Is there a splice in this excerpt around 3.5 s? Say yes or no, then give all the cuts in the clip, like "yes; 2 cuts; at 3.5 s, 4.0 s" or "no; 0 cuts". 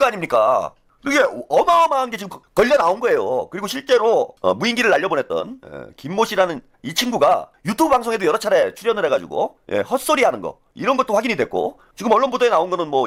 no; 0 cuts